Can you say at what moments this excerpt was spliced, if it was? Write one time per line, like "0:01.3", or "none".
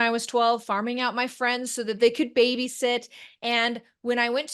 none